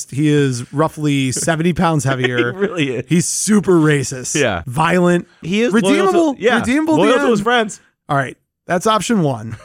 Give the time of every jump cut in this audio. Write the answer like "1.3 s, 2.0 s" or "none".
4.6 s, 5.4 s